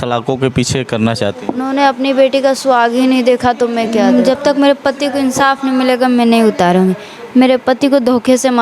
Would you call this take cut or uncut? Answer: cut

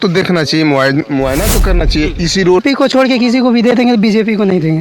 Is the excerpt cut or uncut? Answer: cut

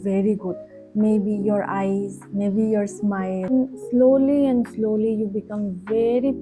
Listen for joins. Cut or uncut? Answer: cut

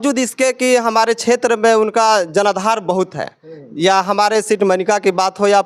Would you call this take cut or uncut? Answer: uncut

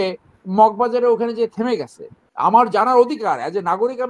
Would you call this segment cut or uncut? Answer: cut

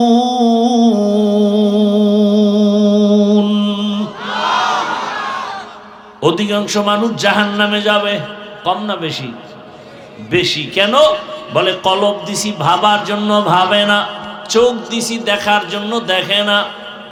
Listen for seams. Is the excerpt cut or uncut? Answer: uncut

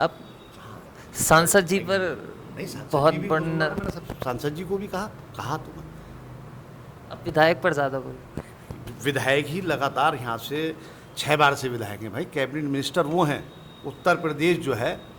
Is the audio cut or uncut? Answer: uncut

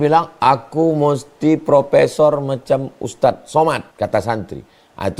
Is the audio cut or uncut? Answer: cut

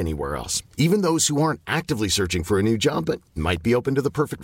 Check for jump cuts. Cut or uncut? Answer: uncut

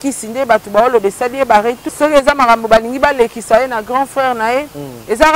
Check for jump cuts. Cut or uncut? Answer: cut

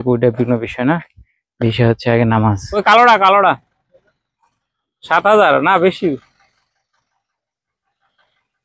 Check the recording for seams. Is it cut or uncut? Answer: cut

